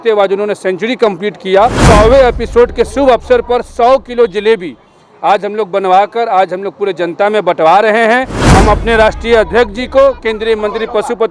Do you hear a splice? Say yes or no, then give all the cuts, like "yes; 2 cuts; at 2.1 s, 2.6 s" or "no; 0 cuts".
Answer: yes; 2 cuts; at 1.8 s, 8.4 s